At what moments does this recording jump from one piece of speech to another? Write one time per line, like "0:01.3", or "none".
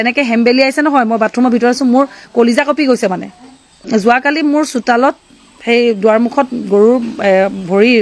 0:03.8

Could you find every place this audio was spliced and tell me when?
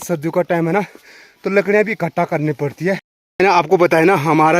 0:03.2

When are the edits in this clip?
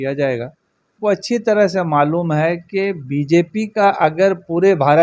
0:00.9

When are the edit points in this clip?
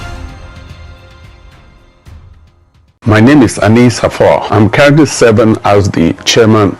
0:02.8

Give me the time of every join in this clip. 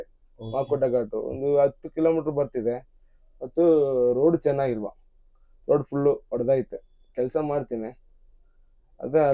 none

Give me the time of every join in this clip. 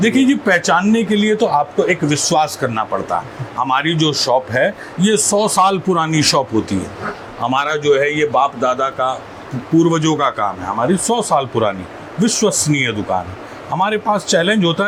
none

